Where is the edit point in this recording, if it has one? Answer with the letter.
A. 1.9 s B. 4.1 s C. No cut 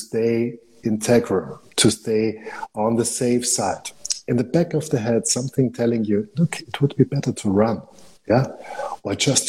B